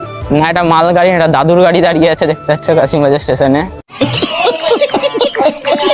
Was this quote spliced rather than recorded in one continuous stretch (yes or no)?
no